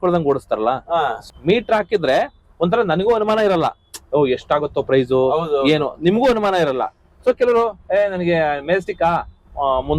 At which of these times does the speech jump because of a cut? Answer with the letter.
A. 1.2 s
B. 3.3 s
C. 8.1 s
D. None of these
A